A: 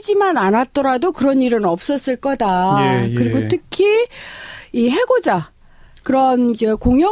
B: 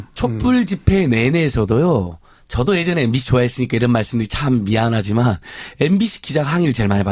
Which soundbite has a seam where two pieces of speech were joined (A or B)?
A